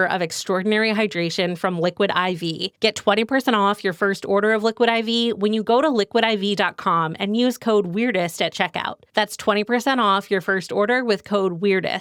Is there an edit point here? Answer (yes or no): no